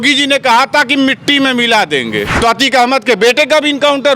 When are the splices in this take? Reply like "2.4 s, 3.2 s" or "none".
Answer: 2.3 s